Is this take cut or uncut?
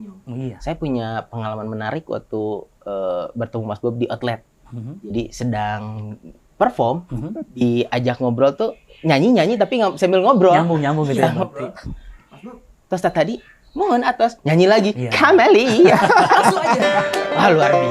uncut